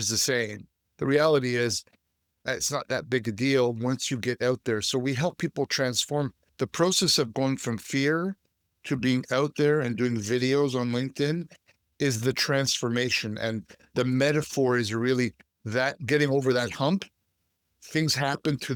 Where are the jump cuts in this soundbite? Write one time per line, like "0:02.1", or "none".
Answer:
none